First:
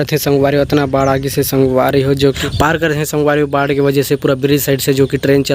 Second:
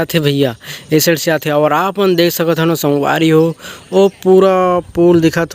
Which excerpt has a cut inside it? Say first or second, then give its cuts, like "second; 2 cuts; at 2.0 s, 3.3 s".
first; 1 cut; at 2.4 s